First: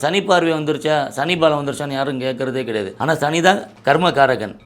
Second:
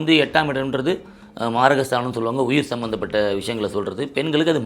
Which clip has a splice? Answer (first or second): first